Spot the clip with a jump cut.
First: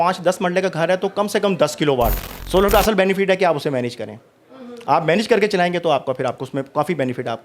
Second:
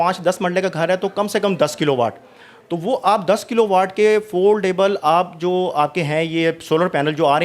first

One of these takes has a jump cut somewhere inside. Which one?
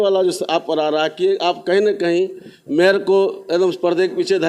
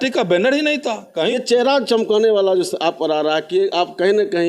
second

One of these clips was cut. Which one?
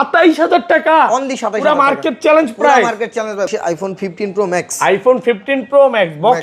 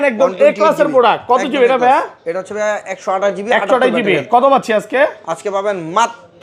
first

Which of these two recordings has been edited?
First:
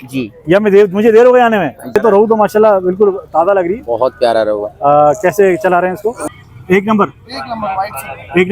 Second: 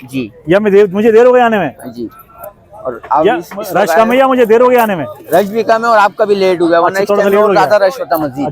first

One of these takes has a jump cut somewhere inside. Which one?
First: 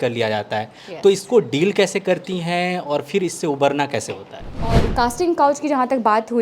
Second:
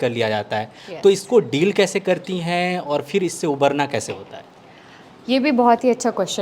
first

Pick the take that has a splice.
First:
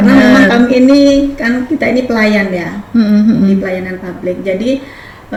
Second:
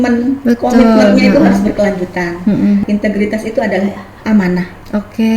second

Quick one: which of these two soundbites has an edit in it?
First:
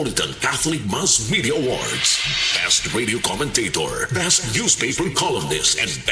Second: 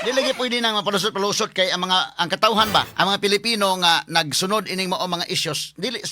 second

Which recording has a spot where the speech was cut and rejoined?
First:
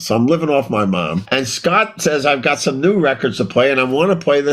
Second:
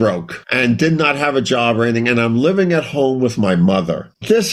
first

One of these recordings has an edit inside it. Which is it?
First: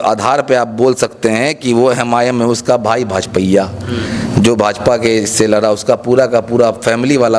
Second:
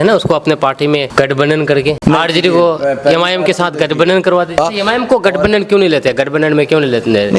second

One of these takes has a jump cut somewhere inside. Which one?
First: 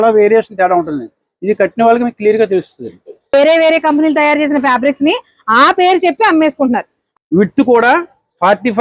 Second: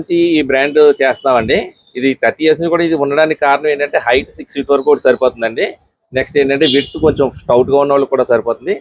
first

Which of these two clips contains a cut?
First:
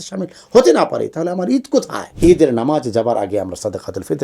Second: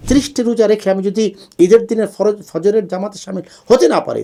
first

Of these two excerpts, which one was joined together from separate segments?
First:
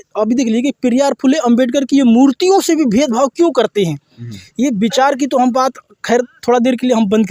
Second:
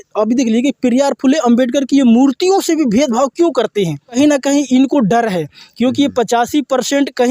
second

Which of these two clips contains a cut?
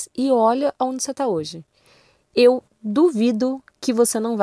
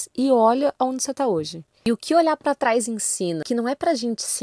second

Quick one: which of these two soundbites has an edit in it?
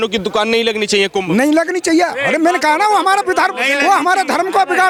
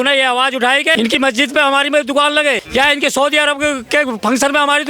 second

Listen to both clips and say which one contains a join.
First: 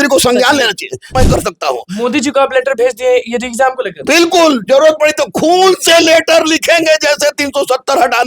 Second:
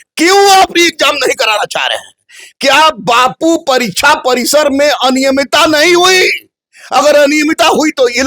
first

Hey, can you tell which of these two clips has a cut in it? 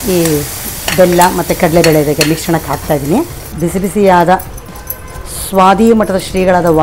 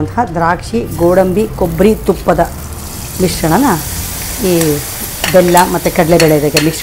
first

